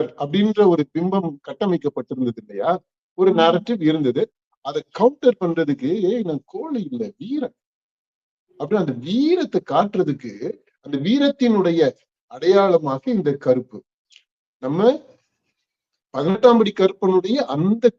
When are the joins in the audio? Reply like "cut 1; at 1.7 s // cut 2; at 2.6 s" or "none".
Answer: none